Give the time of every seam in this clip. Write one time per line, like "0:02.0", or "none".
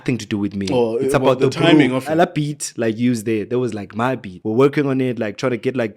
0:02.1
0:04.3